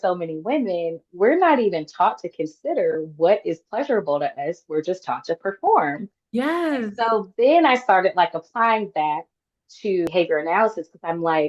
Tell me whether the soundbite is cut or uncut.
cut